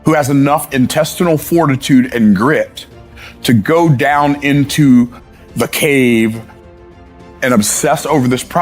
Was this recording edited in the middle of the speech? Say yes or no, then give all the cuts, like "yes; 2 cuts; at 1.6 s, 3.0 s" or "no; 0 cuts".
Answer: yes; 2 cuts; at 5.2 s, 6.8 s